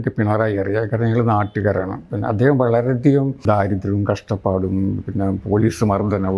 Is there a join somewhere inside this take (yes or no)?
yes